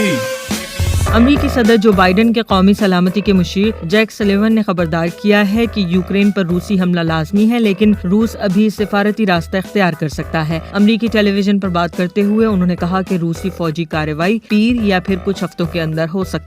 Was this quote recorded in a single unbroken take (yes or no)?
no